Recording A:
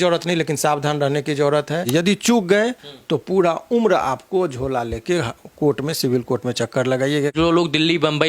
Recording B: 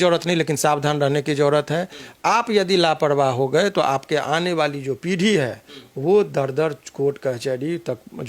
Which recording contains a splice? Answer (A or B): A